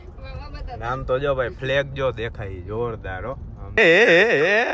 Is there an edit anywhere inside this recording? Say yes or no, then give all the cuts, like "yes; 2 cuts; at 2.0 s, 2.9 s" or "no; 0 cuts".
yes; 1 cut; at 3.8 s